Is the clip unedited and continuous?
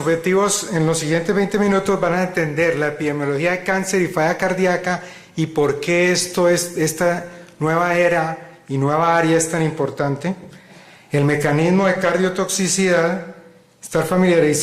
no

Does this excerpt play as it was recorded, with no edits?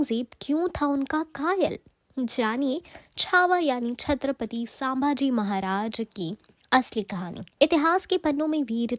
no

